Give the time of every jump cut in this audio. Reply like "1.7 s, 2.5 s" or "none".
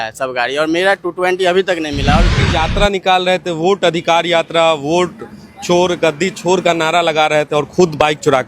2.4 s